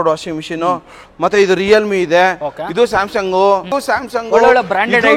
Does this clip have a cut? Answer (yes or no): yes